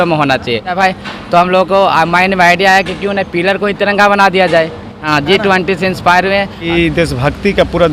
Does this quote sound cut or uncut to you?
cut